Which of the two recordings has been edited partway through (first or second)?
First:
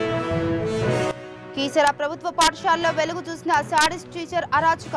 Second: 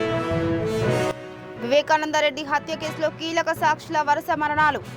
first